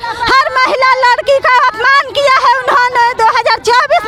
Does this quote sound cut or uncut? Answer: uncut